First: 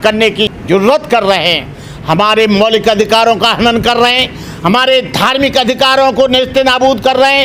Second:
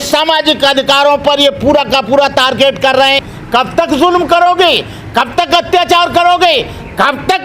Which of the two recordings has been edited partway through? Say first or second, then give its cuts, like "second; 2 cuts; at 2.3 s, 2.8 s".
second; 1 cut; at 3.3 s